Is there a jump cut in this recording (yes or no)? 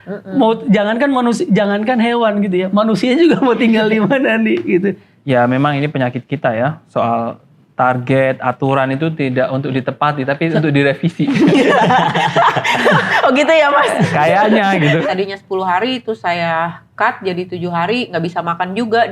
yes